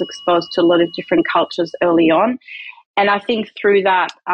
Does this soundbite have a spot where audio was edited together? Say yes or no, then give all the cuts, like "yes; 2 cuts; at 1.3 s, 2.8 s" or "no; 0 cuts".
no; 0 cuts